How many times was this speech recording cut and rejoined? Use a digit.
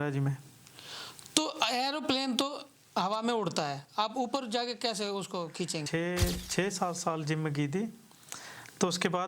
1